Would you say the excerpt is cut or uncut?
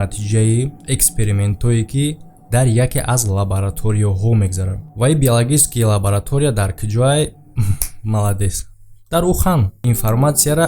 cut